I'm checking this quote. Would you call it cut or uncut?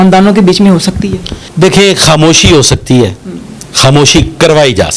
uncut